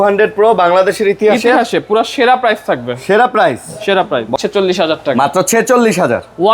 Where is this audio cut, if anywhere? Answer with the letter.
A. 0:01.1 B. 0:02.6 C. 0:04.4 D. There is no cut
C